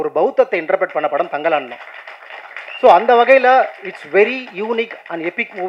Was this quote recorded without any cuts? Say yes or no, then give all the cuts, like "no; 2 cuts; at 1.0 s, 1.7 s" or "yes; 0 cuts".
yes; 0 cuts